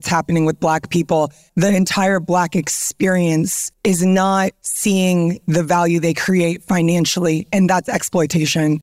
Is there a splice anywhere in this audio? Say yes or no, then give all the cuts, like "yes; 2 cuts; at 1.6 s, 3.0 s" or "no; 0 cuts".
yes; 1 cut; at 1.4 s